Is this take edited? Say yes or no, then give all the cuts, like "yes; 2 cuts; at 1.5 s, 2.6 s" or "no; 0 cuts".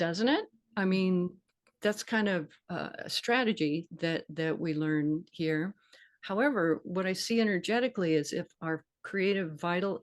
yes; 1 cut; at 2.6 s